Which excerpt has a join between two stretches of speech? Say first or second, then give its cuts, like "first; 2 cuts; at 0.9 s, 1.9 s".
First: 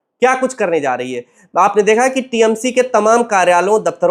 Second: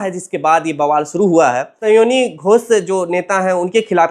second; 1 cut; at 1.7 s